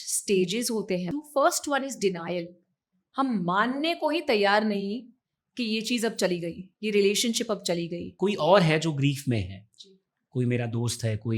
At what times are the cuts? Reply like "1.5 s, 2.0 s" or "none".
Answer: 1.1 s, 8.0 s